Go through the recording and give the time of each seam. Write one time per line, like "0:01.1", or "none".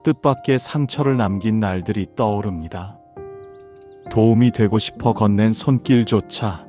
0:02.8
0:04.1